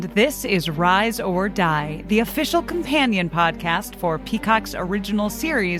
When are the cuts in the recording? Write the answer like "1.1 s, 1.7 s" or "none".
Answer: none